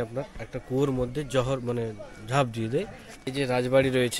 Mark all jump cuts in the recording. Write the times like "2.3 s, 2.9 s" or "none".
3.2 s